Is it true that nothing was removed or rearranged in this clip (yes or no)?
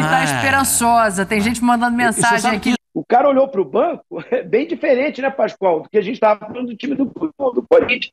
no